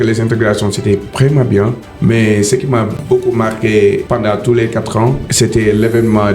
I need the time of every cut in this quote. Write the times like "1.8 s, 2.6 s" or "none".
1.8 s, 4.0 s, 5.2 s